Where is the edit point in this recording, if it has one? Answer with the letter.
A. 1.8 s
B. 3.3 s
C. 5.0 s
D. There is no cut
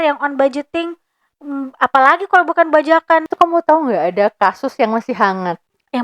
B